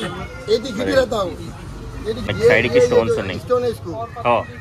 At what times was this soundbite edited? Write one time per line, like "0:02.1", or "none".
0:02.2